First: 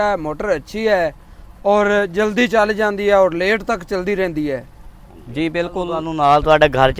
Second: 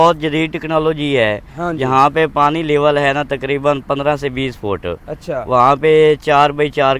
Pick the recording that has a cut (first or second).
first